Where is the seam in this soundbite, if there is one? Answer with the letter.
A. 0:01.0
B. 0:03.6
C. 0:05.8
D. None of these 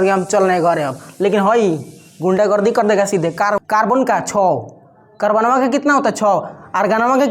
B